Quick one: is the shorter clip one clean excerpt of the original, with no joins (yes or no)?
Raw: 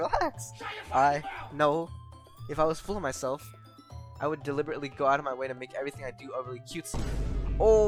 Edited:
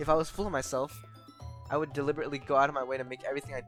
yes